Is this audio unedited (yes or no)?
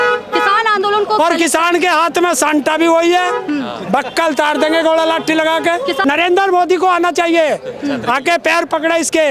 no